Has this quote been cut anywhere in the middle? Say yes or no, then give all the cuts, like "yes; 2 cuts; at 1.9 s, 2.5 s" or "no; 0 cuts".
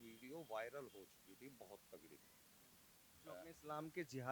no; 0 cuts